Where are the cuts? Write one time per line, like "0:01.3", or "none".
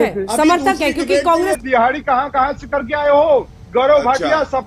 0:01.6
0:03.6